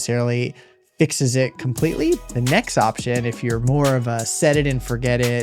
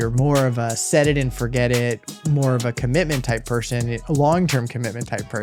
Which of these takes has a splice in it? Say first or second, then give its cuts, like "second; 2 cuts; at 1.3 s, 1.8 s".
first; 1 cut; at 2.2 s